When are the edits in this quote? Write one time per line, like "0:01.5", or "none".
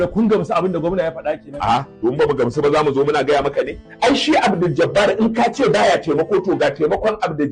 0:03.8